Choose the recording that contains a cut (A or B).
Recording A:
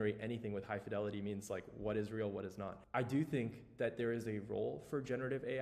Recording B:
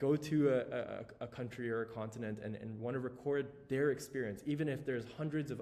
A